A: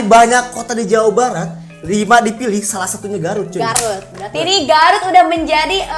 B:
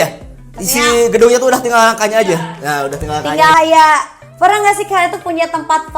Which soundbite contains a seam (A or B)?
B